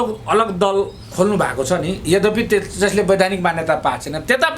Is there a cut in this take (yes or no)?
no